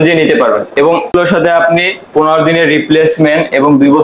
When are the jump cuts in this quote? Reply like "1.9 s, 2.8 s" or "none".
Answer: 1.1 s